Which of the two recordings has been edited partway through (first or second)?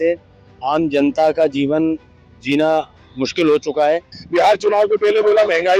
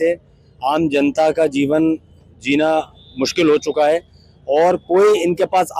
first